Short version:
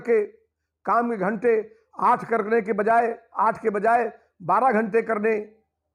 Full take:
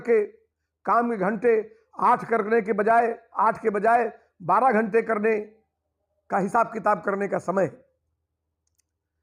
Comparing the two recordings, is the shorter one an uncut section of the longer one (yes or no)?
yes